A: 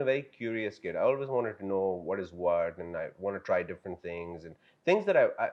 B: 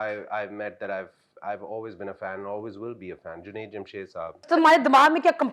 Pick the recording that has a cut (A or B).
B